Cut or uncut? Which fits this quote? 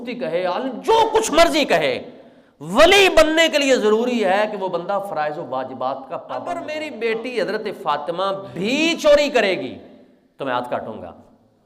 cut